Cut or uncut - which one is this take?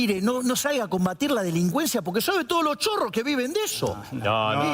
uncut